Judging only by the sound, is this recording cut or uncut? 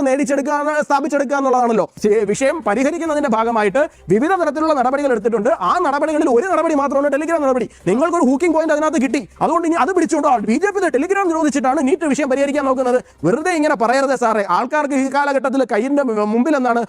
cut